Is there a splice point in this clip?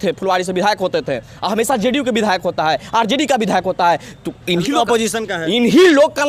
no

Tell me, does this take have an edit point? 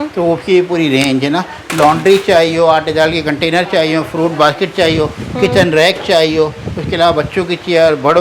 no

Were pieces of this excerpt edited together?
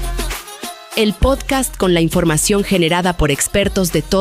yes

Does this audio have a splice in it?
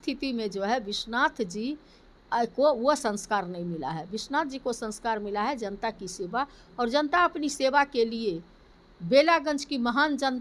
no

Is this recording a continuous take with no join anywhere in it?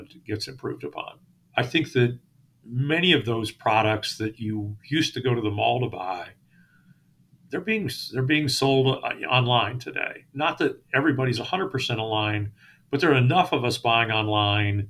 no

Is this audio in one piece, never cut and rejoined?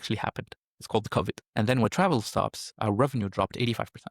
no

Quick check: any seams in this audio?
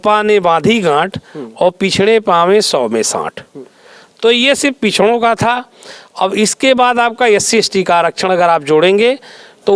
no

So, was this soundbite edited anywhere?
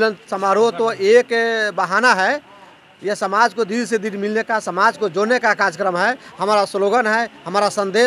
no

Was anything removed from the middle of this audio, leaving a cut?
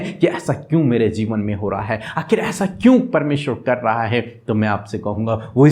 no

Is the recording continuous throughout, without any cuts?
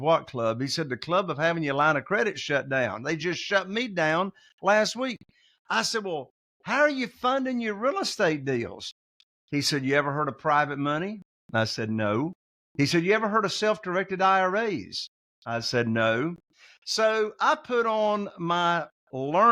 yes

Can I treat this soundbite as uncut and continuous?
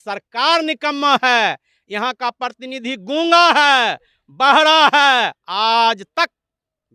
yes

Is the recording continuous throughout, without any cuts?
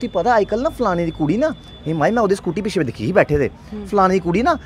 yes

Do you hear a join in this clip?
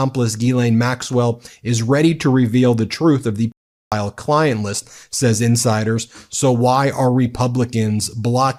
no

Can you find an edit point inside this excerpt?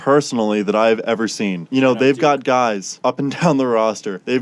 yes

